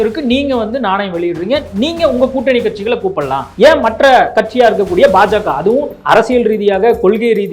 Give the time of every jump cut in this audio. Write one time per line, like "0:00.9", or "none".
0:03.4
0:04.4
0:05.9